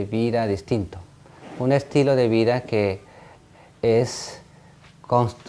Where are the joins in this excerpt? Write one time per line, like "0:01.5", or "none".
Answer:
none